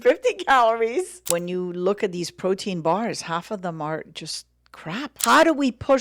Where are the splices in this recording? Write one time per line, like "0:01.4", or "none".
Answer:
0:01.2
0:05.1